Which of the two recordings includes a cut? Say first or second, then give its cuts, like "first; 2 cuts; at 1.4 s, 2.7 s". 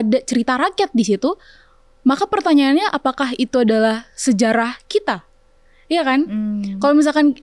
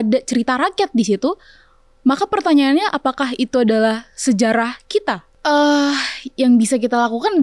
second; 1 cut; at 5.3 s